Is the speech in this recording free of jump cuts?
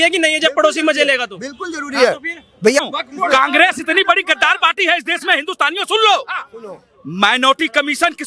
no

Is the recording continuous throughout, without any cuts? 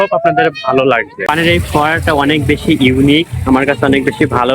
no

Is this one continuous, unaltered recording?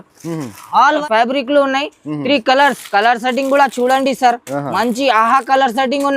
no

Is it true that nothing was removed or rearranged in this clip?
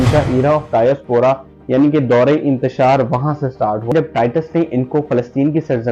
no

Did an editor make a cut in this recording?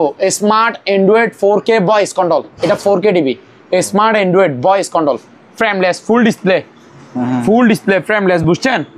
no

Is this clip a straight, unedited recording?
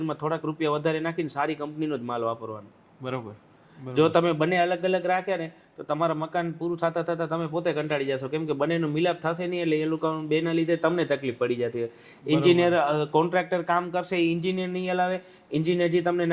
no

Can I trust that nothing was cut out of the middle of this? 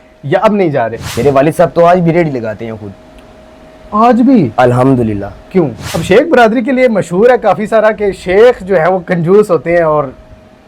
no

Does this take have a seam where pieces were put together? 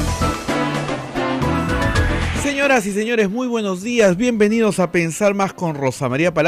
no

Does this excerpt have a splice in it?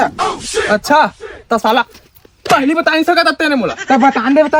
no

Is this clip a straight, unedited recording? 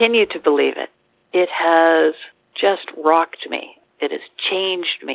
no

